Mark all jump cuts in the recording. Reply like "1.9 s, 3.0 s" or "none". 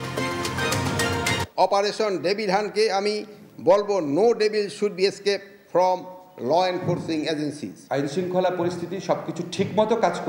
1.4 s, 7.7 s